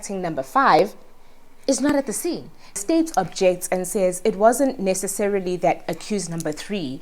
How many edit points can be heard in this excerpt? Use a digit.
1